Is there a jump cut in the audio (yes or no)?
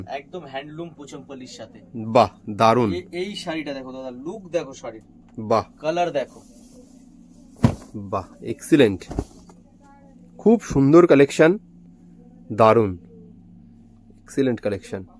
no